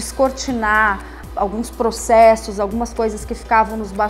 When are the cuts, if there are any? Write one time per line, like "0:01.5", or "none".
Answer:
0:01.2